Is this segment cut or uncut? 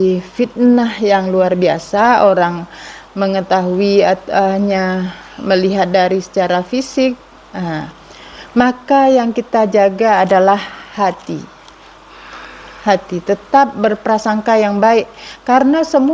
uncut